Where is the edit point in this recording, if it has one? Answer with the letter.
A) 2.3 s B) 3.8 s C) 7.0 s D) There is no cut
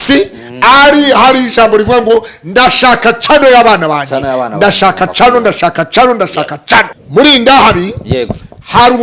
C